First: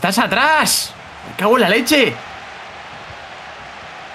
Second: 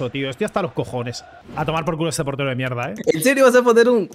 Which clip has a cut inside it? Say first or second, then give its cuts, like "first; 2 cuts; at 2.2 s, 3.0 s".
second; 2 cuts; at 1.5 s, 2.9 s